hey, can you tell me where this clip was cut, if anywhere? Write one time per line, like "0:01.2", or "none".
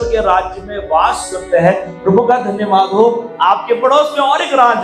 none